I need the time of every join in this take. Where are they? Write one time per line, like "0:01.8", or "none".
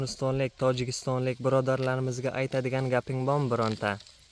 none